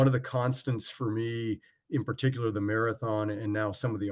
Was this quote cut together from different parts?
no; 0 cuts

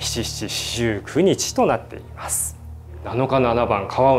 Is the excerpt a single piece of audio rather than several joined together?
no; 1 cut; at 2.9 s

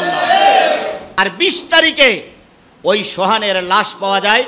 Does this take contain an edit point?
yes; 1 cut; at 1.1 s

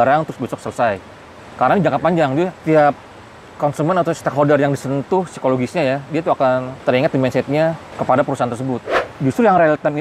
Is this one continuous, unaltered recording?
no; 4 cuts; at 2.6 s, 6.7 s, 7.9 s, 9.0 s

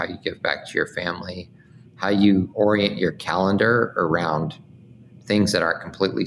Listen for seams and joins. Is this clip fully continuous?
no; 1 cut; at 2.5 s

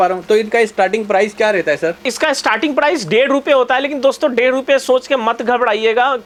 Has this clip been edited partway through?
no; 0 cuts

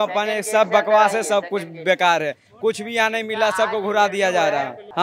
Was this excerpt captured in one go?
yes; 0 cuts

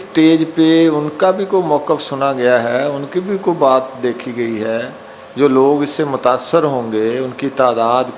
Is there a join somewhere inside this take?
no; 0 cuts

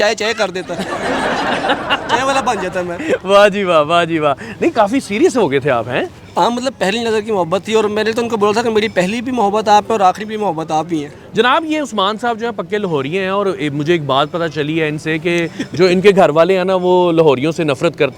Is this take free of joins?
yes; 0 cuts

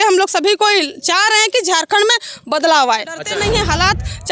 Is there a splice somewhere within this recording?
yes; 1 cut; at 3.3 s

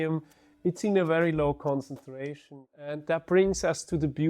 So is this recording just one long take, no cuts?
no; 1 cut; at 2.3 s

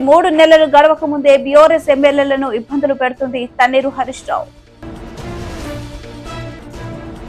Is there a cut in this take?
no; 0 cuts

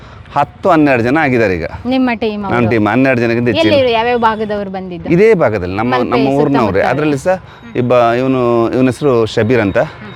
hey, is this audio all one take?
yes; 0 cuts

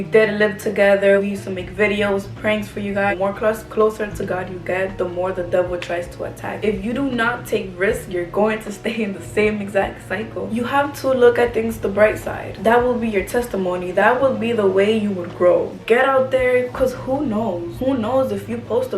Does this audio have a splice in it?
yes; 5 cuts; at 3.1 s, 6.5 s, 10.4 s, 15.8 s, 17.7 s

